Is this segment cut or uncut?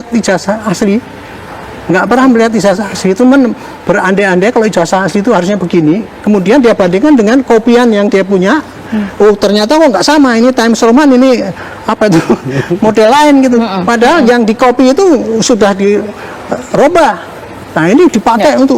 uncut